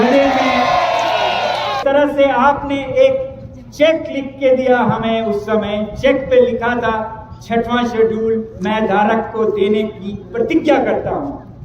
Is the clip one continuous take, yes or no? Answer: no